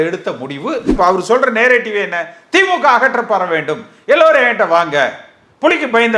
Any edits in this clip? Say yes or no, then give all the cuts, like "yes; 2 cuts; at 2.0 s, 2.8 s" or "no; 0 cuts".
yes; 1 cut; at 0.9 s